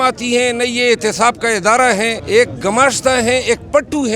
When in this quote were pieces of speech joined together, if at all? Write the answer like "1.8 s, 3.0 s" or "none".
2.2 s